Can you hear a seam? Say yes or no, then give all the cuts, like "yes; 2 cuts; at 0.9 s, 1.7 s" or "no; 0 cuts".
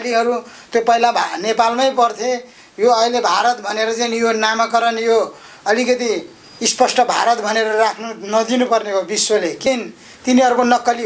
yes; 1 cut; at 9.6 s